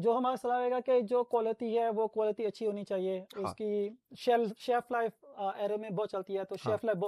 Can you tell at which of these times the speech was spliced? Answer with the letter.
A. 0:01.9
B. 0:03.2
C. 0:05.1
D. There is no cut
D